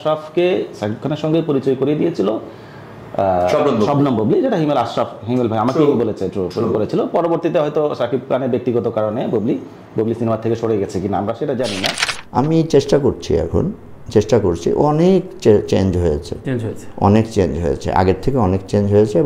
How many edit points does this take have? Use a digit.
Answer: 1